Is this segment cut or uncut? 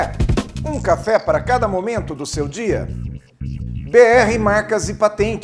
uncut